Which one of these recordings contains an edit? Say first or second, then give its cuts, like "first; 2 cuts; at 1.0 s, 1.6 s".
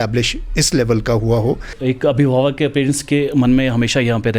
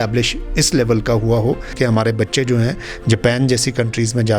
second; 1 cut; at 1.7 s